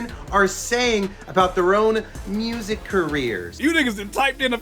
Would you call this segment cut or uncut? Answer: cut